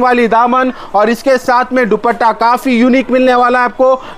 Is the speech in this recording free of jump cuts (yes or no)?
yes